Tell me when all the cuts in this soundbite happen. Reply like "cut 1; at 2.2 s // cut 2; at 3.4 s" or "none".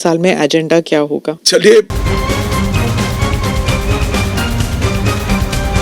cut 1; at 1.4 s // cut 2; at 2.0 s